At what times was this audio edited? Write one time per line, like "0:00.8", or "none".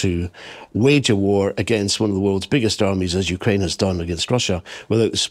none

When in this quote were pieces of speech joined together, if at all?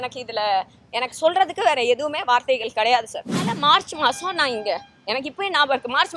0:03.5

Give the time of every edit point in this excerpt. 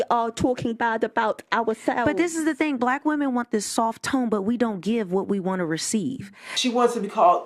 0:02.0
0:06.5

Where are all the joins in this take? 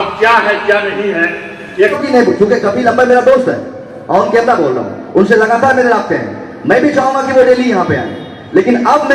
0:02.0

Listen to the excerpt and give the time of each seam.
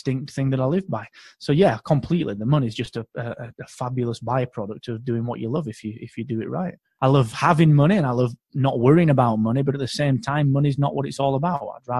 0:06.8

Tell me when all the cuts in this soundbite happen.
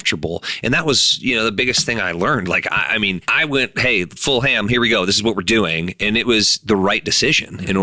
0:03.3

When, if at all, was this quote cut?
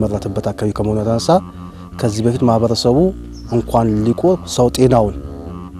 none

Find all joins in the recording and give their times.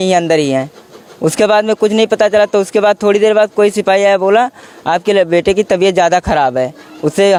none

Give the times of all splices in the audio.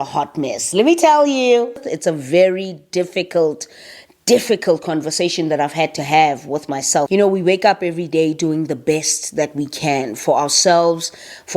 0:01.8
0:07.1

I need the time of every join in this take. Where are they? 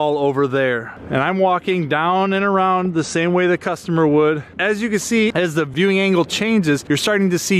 none

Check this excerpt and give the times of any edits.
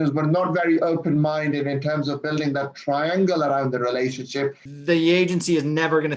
0:04.7

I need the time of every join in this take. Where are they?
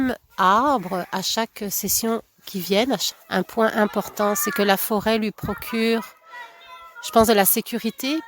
0:03.1

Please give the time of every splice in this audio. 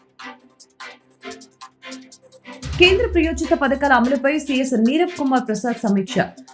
0:00.9

